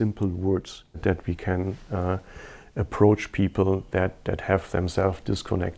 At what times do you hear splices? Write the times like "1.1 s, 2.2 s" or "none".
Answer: 1.0 s